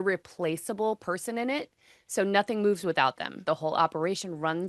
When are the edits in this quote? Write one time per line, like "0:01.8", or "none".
0:03.4